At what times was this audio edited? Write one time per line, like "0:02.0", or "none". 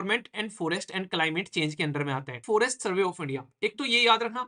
0:02.4